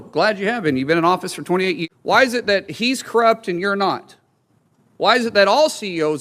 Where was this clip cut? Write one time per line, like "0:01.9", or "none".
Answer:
0:01.8